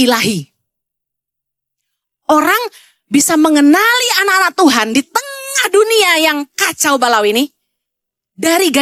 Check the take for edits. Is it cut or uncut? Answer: uncut